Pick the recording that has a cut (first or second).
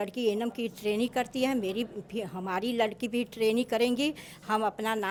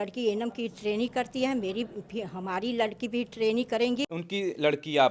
second